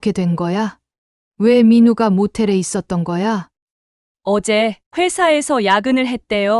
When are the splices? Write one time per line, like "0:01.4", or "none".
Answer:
0:03.5